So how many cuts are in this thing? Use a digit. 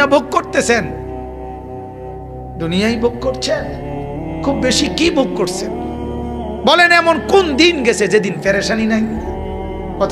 2